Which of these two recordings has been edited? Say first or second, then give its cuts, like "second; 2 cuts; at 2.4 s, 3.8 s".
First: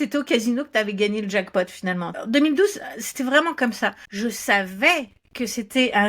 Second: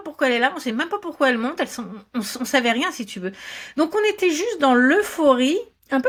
first; 2 cuts; at 2.2 s, 4.0 s